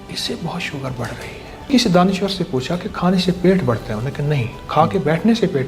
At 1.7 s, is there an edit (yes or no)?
yes